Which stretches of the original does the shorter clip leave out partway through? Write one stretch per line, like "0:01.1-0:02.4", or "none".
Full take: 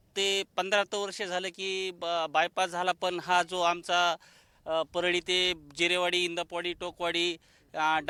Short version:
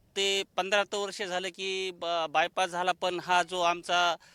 none